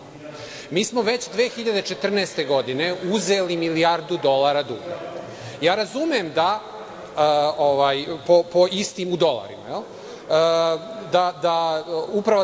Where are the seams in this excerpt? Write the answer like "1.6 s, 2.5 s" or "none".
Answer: none